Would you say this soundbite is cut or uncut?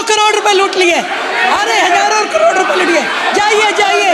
uncut